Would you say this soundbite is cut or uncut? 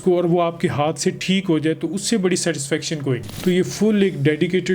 cut